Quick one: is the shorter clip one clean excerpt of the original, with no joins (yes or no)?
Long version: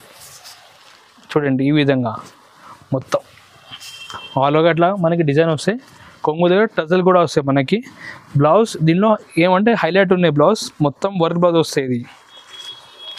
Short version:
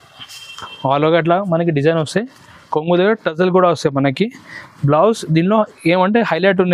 yes